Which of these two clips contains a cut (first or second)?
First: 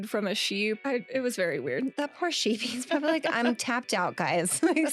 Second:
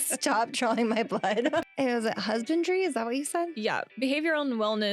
second